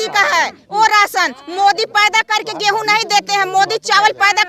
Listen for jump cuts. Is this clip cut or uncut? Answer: uncut